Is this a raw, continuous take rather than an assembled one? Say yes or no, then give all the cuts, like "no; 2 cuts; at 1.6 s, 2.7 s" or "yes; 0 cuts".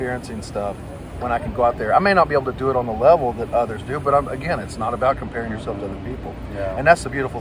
yes; 0 cuts